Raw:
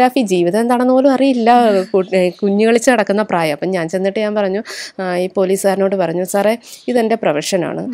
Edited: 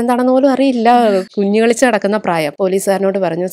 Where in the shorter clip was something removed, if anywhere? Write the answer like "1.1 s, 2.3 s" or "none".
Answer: 1.3 s, 2.5 s